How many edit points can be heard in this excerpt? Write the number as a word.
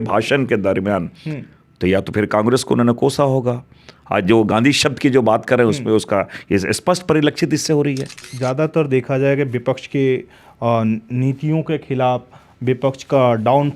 one